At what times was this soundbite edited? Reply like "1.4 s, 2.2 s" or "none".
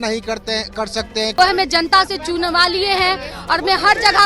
1.3 s

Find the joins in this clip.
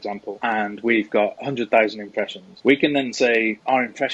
none

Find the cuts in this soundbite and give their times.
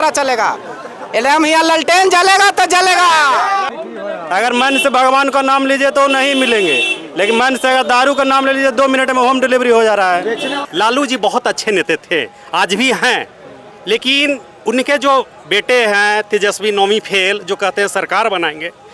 3.7 s, 10.6 s

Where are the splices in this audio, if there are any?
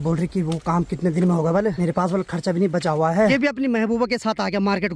1.8 s, 3.3 s

